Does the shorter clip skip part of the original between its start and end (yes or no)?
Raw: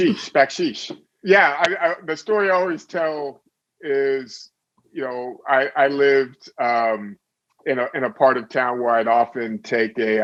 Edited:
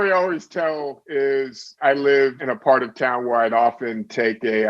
yes